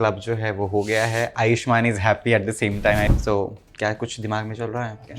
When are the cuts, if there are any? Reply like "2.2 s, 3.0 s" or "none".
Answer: 3.1 s